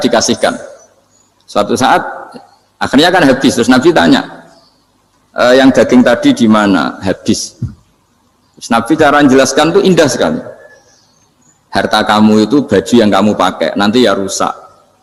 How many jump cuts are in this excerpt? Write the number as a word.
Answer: zero